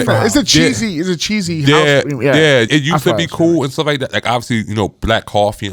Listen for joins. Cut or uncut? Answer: cut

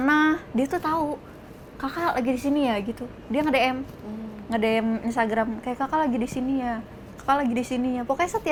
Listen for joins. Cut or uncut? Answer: uncut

